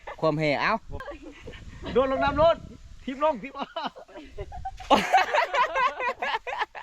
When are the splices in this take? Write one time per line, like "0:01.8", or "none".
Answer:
0:00.9